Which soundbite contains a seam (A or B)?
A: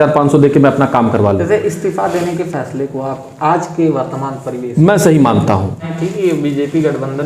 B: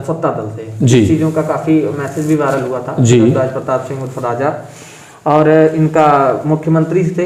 A